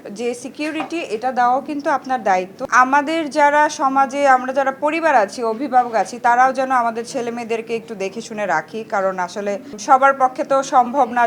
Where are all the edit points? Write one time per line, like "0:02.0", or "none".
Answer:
none